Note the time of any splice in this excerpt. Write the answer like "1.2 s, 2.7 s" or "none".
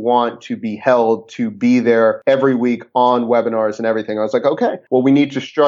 2.2 s